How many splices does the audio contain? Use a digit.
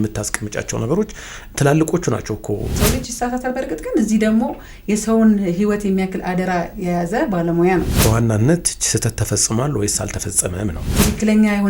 3